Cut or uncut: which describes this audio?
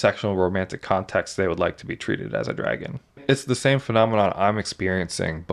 cut